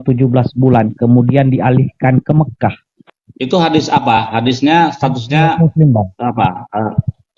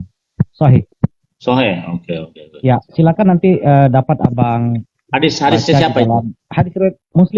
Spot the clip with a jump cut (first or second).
second